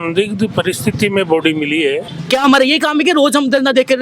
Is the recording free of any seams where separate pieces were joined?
no; 1 cut; at 2.1 s

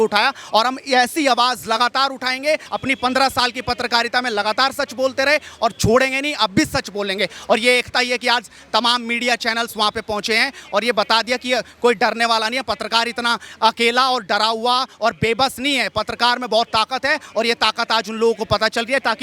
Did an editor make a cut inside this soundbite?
yes; 1 cut; at 2.7 s

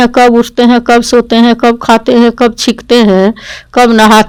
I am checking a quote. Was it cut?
no; 0 cuts

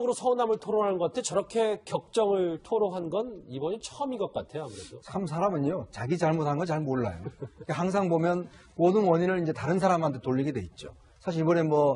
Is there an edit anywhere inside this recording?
no; 0 cuts

